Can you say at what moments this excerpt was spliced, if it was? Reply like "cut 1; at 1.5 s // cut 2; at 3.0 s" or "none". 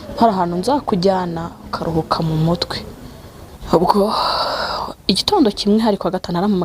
cut 1; at 3.5 s